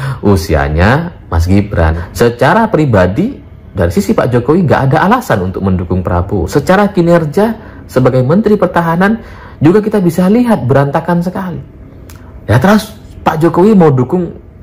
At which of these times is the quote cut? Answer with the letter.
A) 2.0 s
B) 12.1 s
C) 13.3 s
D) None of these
A